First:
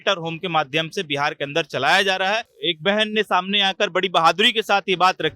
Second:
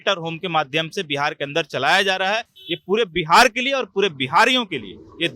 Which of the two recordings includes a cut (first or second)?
first